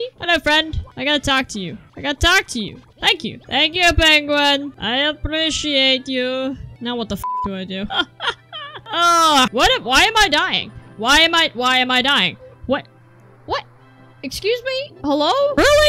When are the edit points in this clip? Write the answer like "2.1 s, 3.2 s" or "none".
3.0 s, 9.5 s

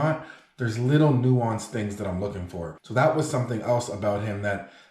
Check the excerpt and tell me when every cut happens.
2.8 s

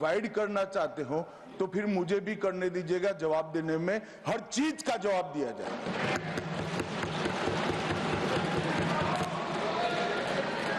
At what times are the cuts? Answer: none

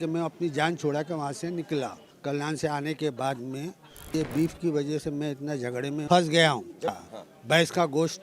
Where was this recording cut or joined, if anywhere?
2.1 s, 4.1 s, 6.0 s, 7.0 s

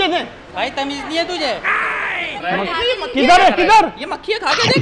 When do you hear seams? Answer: 2.4 s

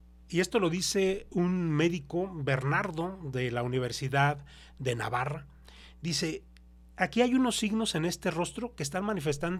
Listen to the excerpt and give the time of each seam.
none

